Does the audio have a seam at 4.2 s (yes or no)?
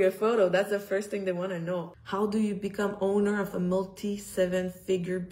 no